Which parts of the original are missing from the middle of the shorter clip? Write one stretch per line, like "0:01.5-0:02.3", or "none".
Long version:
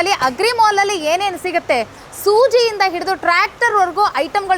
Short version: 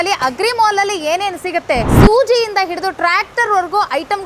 0:01.9-0:02.1